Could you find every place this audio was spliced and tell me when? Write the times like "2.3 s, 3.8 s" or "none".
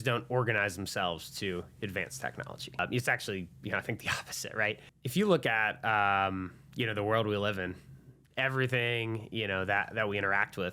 2.8 s, 4.9 s